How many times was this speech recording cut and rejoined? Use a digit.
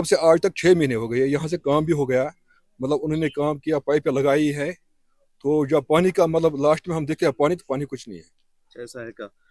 0